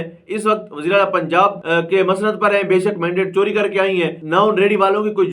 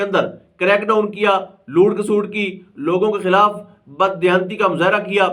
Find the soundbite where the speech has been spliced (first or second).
first